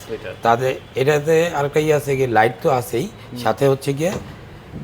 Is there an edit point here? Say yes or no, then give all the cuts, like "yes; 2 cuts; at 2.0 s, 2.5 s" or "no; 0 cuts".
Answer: no; 0 cuts